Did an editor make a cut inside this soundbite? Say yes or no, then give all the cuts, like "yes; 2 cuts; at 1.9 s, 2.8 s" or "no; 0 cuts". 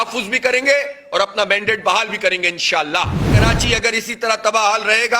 yes; 1 cut; at 3.4 s